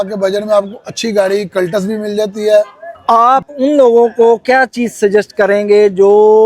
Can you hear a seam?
yes; 1 cut; at 3.2 s

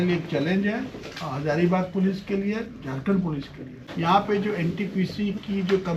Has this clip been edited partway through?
yes; 1 cut; at 3.8 s

